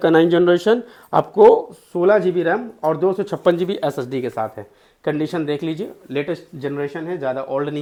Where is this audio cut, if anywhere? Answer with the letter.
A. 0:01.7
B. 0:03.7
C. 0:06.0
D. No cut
D